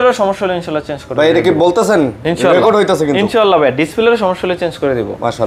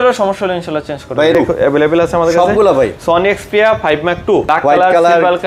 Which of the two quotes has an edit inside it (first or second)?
second